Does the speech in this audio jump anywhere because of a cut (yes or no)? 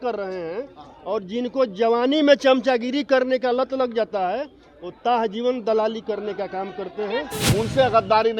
yes